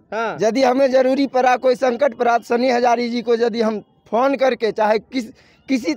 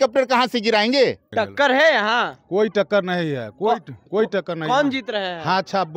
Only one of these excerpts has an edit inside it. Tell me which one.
second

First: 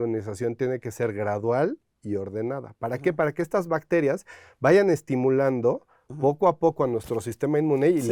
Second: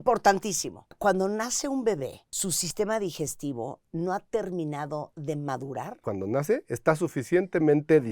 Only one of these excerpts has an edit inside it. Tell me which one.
second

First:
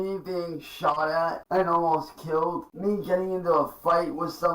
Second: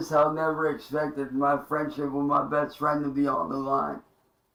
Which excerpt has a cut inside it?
first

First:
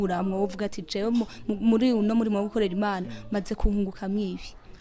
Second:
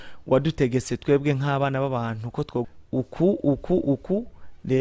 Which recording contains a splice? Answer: second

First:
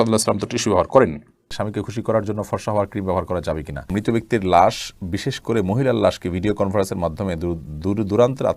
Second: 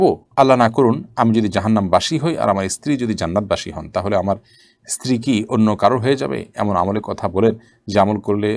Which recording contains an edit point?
first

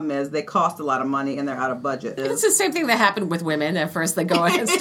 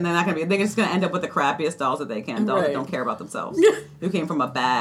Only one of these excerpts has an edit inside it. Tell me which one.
first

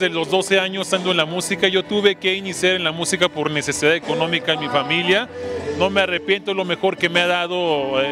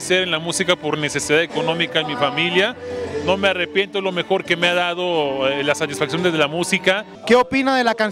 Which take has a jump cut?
second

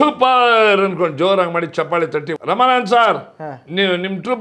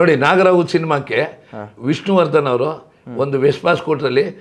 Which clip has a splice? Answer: first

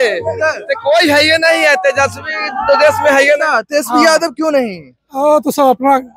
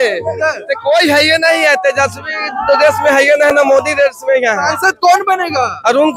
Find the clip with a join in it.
first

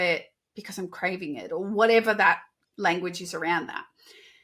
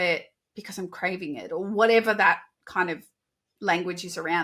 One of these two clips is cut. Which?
first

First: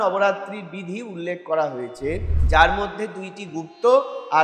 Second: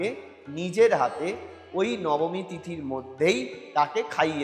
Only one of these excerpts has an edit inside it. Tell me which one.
second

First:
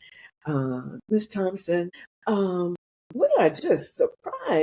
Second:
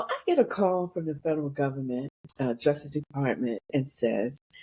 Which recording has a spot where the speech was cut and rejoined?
first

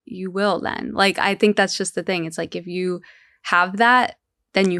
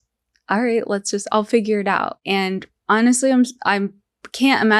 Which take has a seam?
second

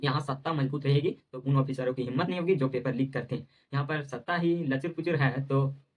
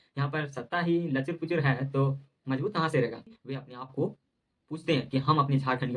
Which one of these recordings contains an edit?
second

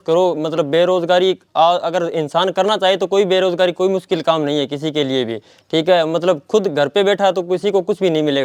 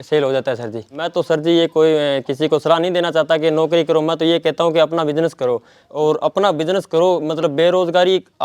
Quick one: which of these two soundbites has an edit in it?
second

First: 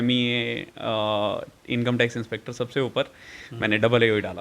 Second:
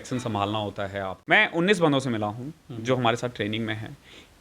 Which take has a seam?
second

